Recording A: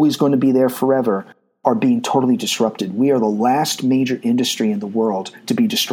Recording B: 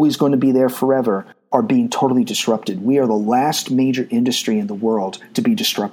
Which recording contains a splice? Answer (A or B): B